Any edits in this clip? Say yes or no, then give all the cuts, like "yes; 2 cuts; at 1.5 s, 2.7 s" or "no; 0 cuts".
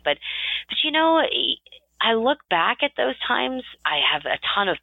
yes; 1 cut; at 3.7 s